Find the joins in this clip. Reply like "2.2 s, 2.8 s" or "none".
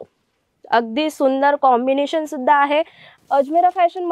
3.0 s

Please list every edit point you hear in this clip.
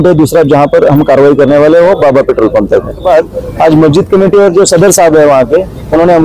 3.0 s

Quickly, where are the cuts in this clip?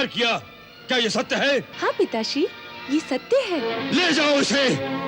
1.7 s, 3.8 s

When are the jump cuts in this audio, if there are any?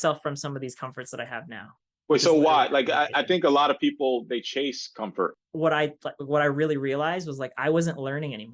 5.3 s

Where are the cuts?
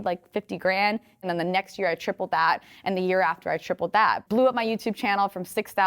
1.2 s, 4.2 s

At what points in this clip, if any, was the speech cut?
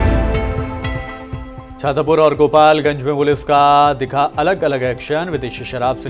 1.2 s

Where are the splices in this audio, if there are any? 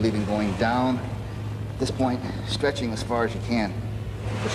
none

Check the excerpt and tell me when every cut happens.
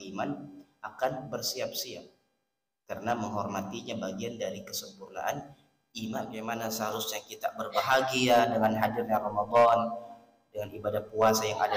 6.4 s

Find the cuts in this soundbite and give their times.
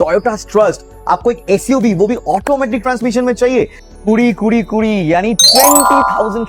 3.8 s

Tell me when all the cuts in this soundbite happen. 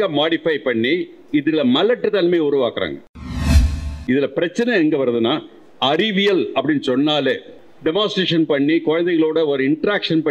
3.6 s, 7.5 s

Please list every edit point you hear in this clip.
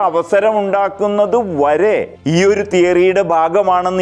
2.1 s

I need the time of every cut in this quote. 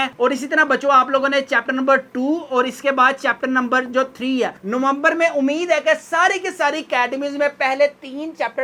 none

